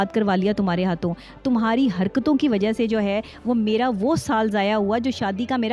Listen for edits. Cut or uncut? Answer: uncut